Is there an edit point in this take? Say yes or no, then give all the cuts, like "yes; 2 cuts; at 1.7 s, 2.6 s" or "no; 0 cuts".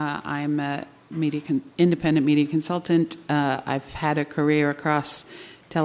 yes; 1 cut; at 4.0 s